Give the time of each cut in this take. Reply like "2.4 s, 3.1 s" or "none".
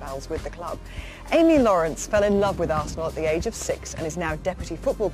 1.7 s